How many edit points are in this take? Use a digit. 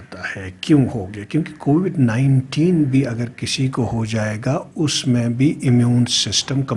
0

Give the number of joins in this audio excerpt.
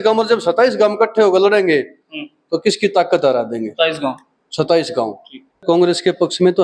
1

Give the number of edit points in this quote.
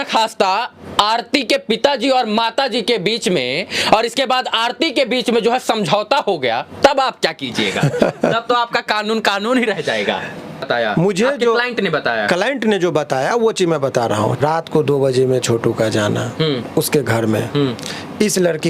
2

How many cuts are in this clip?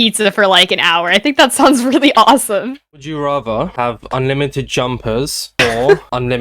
1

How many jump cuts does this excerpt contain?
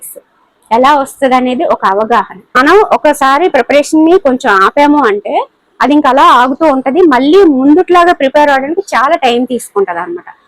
1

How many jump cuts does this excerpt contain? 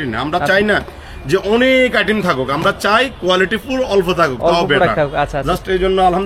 0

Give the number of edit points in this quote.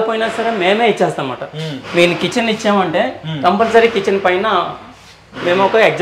0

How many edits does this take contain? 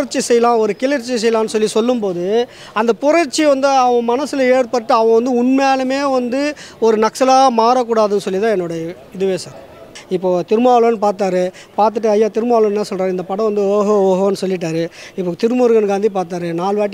1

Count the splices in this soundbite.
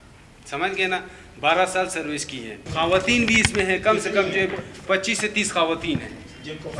1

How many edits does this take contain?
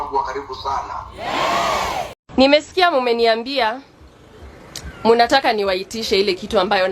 1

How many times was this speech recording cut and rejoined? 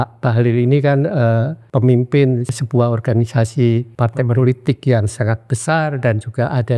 3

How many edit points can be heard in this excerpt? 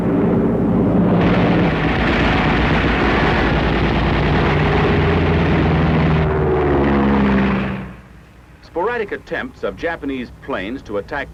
0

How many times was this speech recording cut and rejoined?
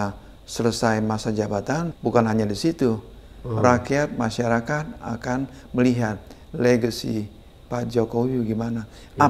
1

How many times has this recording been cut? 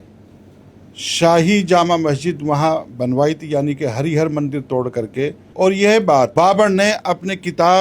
2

